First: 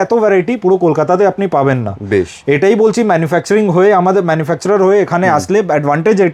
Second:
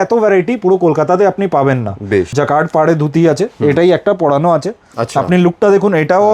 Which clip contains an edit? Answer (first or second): second